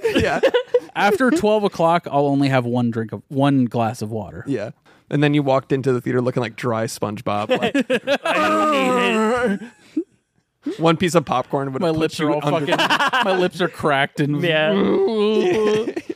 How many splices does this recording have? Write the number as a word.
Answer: one